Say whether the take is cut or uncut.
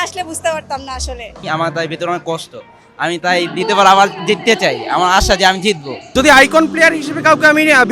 cut